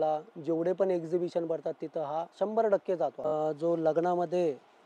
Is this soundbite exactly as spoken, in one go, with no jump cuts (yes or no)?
no